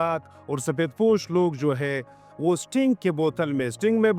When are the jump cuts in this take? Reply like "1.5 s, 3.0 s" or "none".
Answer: none